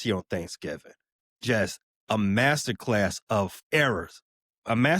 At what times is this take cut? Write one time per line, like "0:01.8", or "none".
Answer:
0:03.7